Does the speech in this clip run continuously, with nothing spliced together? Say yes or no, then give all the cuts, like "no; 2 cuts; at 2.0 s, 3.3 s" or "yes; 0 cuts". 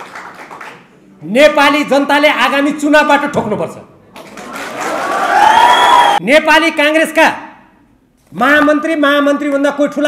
no; 1 cut; at 6.2 s